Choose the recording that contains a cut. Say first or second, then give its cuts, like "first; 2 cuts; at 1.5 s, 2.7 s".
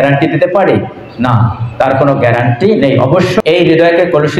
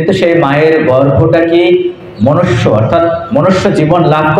first; 1 cut; at 3.4 s